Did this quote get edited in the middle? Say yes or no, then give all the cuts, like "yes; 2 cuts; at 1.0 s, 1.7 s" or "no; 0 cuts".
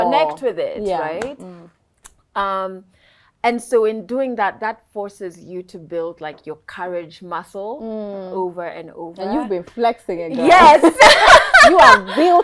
no; 0 cuts